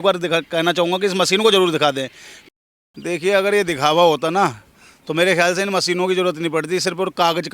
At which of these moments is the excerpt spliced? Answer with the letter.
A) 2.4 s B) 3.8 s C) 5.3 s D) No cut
A